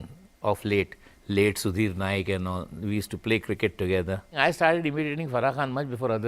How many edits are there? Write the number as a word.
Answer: one